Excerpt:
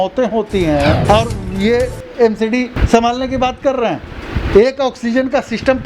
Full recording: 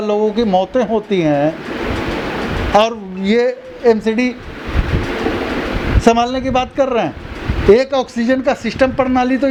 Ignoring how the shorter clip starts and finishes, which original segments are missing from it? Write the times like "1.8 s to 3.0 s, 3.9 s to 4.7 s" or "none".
1.6 s to 2.7 s, 4.4 s to 5.9 s

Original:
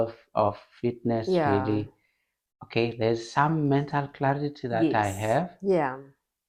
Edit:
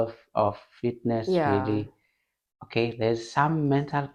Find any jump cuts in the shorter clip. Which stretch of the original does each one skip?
none

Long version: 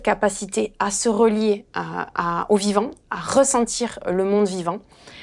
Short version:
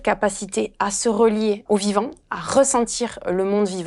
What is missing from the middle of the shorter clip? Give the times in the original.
1.6 s to 2.4 s

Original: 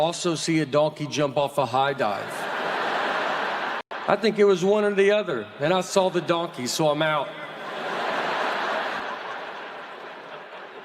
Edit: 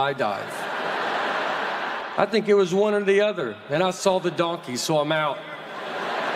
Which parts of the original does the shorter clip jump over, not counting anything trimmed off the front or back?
3.8 s to 3.9 s

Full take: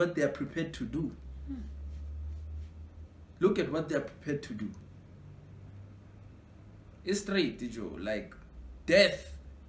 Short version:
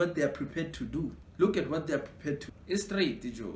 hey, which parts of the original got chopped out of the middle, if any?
1.2 s to 3.2 s, 4.5 s to 6.8 s

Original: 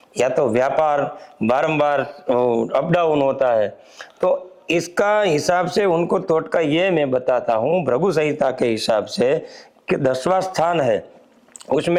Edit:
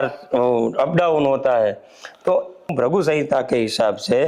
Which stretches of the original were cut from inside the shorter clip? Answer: 4.7 s to 7.8 s

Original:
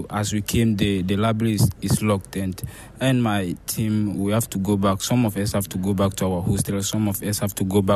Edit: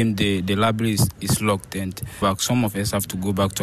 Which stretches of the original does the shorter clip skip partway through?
2.8 s to 4.8 s

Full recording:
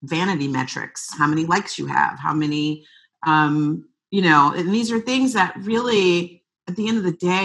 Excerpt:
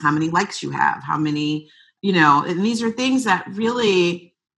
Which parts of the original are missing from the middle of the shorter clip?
3.0 s to 3.9 s

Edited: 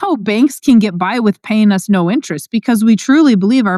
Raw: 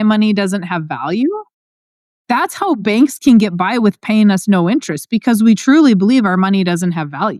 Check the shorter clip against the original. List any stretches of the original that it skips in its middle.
none

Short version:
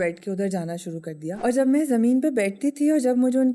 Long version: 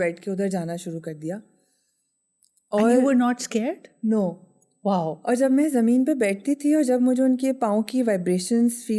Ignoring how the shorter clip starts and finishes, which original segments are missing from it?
1.4 s to 5.2 s

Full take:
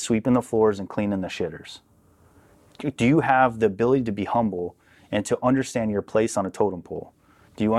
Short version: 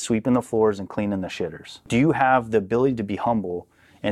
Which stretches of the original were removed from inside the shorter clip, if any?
1.8 s to 2.9 s

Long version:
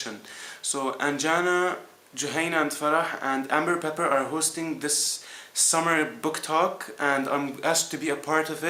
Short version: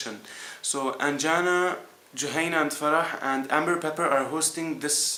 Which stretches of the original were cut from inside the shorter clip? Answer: none

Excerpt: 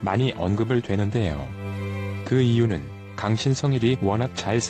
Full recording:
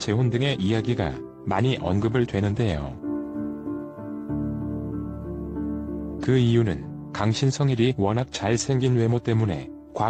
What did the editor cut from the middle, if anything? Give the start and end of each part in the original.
3.2 s to 5.7 s

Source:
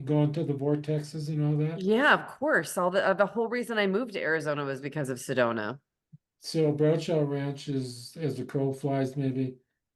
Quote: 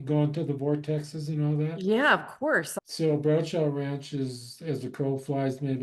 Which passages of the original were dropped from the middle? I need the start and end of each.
2.7 s to 6.3 s

